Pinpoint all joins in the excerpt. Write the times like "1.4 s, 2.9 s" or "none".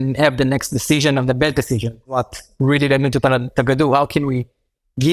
2.2 s

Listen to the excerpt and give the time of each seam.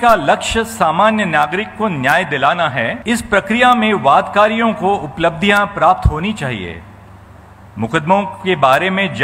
3.0 s

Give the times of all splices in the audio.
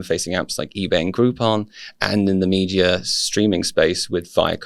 none

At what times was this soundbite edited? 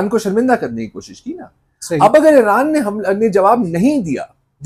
none

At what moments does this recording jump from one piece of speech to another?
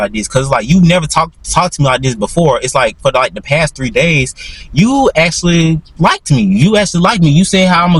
none

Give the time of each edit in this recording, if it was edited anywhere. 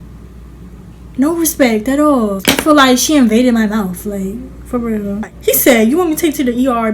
2.4 s, 5.3 s

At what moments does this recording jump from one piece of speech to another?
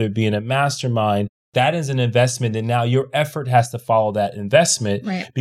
1.5 s

